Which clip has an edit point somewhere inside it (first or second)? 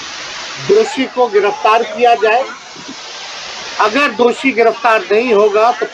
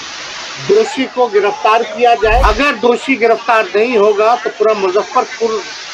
second